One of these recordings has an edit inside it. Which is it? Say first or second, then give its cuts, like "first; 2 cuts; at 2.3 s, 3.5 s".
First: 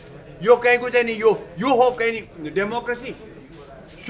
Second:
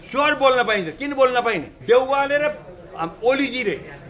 second; 1 cut; at 1.7 s